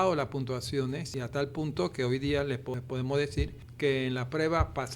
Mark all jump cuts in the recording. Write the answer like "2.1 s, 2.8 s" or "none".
1.1 s, 2.8 s, 3.6 s